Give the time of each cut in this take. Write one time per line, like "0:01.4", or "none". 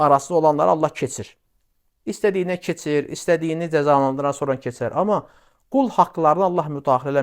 none